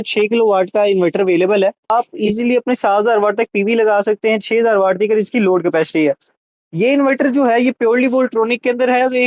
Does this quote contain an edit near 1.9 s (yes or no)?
yes